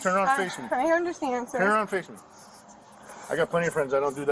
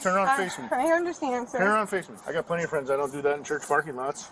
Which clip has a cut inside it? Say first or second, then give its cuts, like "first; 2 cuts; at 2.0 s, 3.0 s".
second; 1 cut; at 2.2 s